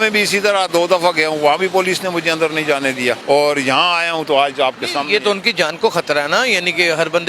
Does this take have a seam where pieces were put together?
yes; 1 cut; at 3.2 s

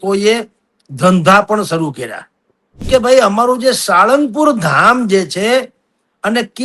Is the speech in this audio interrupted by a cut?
yes; 1 cut; at 2.8 s

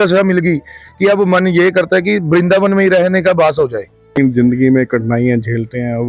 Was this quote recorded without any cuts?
no; 1 cut; at 4.2 s

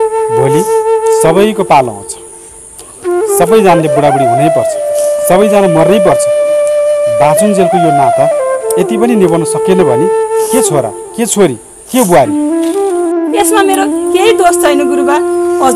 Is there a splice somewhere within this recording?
no; 0 cuts

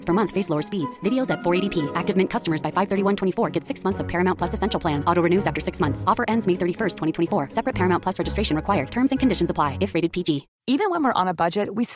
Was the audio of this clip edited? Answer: yes; 1 cut; at 10.5 s

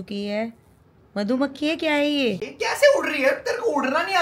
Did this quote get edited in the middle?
yes; 1 cut; at 2.5 s

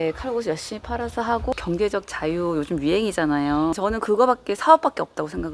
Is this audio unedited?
no; 2 cuts; at 1.5 s, 3.7 s

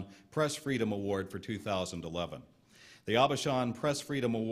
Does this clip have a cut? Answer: yes; 1 cut; at 3.1 s

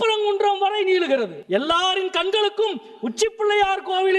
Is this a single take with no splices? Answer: no; 1 cut; at 1.4 s

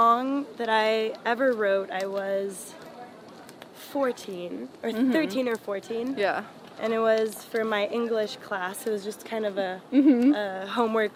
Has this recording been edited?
no; 0 cuts

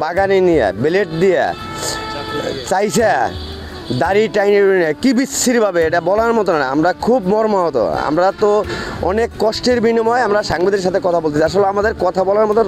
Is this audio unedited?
yes; 0 cuts

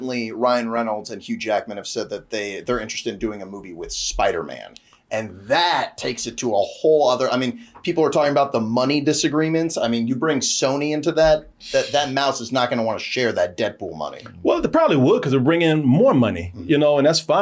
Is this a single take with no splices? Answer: yes; 0 cuts

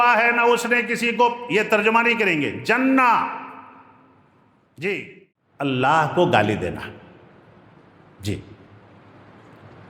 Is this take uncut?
no; 1 cut; at 5.6 s

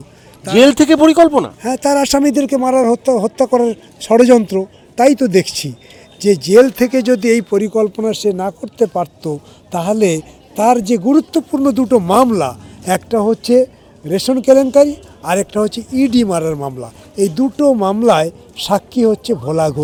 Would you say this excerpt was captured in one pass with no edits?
yes; 0 cuts

